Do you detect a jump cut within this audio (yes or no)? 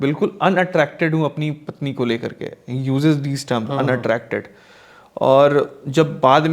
no